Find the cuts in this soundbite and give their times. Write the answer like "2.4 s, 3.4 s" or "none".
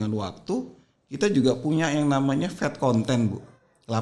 none